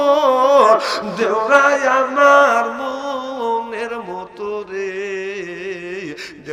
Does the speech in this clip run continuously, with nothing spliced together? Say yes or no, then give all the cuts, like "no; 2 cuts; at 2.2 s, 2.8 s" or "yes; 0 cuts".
yes; 0 cuts